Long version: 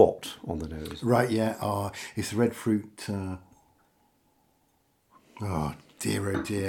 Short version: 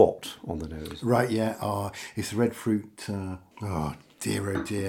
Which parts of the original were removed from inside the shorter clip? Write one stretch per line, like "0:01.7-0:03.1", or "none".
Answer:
0:03.5-0:05.3